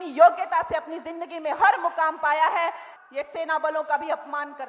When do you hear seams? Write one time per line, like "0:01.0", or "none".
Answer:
0:02.8